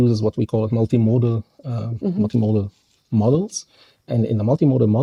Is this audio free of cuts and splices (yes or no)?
yes